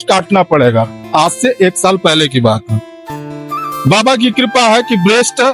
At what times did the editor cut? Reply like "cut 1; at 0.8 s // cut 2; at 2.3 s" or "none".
none